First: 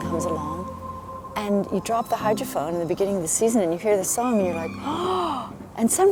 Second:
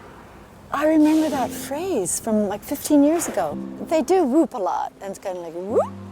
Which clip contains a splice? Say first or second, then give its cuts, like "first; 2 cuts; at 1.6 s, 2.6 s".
second; 1 cut; at 3.6 s